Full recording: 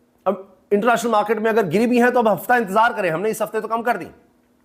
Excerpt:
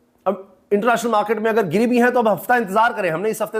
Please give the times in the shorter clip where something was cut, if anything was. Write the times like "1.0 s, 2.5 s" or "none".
none